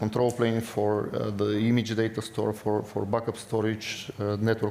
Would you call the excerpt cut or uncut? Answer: uncut